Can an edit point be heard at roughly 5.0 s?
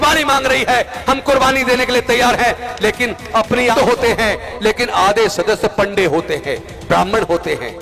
no; 1 cut; at 3.7 s

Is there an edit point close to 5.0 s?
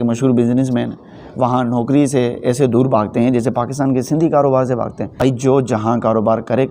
yes; 1 cut; at 5.0 s

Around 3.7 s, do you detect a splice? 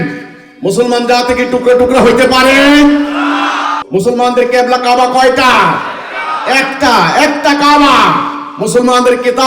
yes; 1 cut; at 3.7 s

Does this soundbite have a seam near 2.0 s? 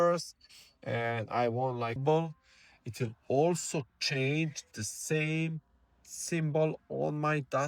yes; 1 cut; at 2.0 s

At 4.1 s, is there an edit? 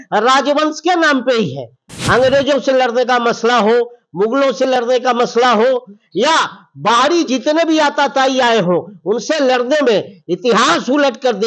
no; 1 cut; at 1.9 s

